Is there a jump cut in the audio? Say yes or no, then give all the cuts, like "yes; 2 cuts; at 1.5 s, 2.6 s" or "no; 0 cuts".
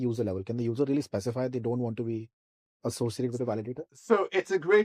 no; 0 cuts